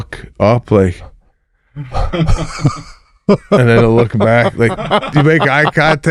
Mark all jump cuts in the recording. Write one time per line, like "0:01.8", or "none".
none